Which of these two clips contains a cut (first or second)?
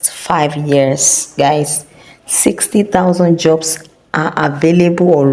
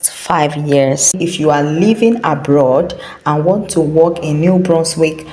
second